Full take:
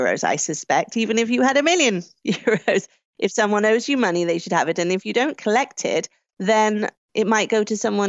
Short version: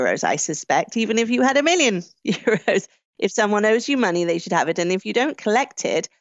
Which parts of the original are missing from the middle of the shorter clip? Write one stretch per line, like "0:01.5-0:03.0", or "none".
none